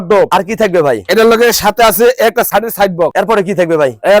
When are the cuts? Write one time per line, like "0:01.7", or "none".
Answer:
0:03.0